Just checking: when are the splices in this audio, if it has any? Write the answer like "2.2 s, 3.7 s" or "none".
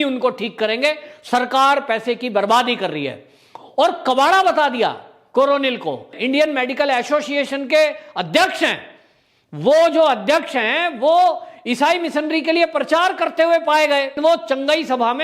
6.1 s, 14.1 s